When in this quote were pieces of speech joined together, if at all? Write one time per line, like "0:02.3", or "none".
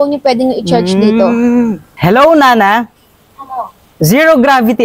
0:01.9
0:03.8